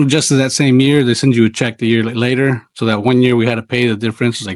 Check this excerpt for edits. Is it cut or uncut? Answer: uncut